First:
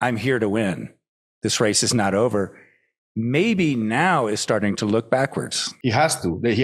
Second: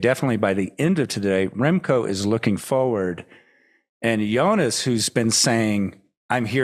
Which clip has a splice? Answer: first; 1 cut; at 5.7 s

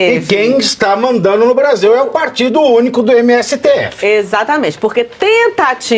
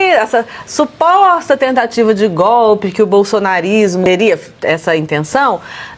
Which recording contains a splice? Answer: second; 1 cut; at 4.0 s

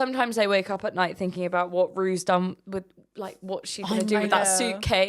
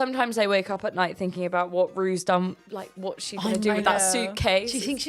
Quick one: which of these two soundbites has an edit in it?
second; 1 cut; at 2.6 s

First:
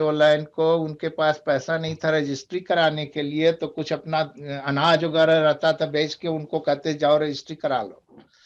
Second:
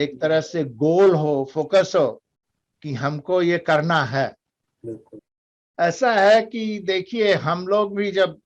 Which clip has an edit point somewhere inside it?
second; 1 cut; at 5.1 s

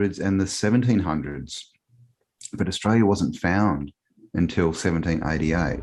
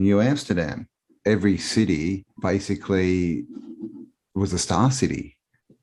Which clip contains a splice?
second; 2 cuts; at 1.1 s, 2.3 s

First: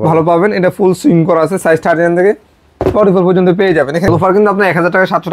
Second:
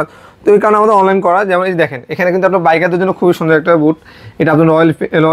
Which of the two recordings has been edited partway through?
first; 1 cut; at 4.1 s

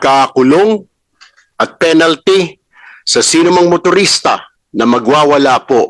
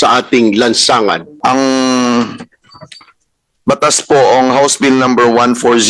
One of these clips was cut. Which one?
second; 1 cut; at 1.3 s

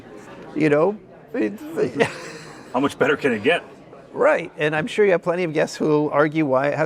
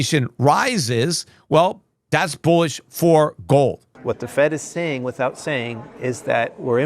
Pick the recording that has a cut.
second; 1 cut; at 3.9 s

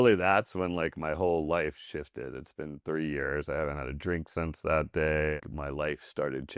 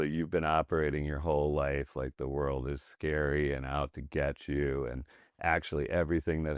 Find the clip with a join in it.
first; 1 cut; at 5.4 s

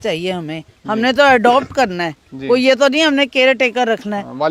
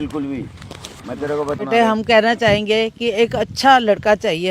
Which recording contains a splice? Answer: second; 1 cut; at 1.6 s

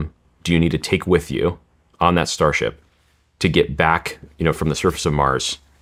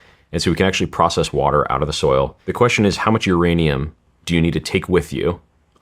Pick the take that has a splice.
second; 1 cut; at 2.4 s

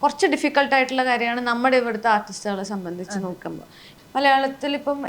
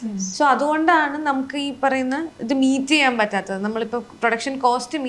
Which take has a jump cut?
first; 1 cut; at 3.9 s

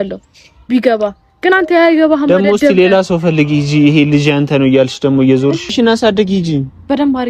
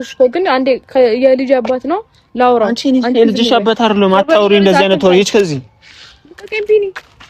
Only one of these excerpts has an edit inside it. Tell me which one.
first; 1 cut; at 5.7 s

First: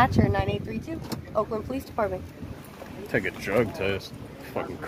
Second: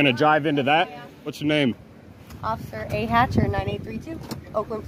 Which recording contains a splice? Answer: second; 1 cut; at 1.4 s

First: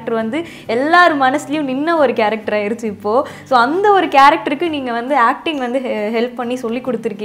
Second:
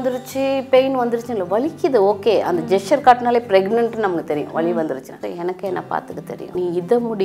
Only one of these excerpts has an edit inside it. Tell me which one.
second; 2 cuts; at 5.1 s, 6.4 s

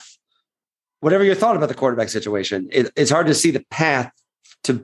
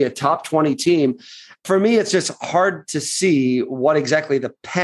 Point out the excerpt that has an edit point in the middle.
second; 1 cut; at 1.6 s

